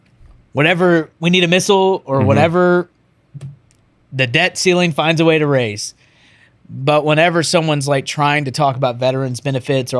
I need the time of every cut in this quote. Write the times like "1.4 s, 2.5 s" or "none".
1.1 s